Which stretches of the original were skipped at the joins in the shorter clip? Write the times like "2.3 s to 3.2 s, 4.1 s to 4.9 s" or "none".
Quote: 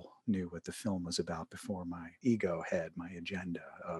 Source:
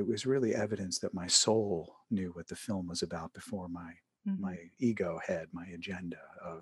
3.9 s to 4.7 s